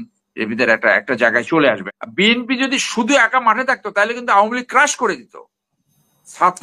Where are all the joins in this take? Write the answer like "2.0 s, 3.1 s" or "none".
1.9 s